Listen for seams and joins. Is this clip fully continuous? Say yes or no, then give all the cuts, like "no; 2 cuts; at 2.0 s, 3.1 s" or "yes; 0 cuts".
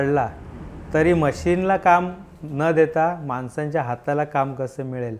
yes; 0 cuts